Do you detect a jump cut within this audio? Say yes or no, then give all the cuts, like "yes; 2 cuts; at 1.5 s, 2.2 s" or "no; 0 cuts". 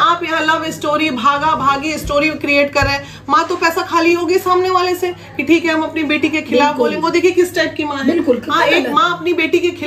no; 0 cuts